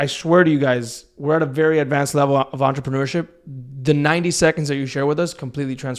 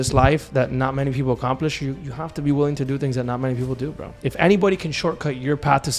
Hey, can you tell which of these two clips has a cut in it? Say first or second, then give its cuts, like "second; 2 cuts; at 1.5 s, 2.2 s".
second; 1 cut; at 4.2 s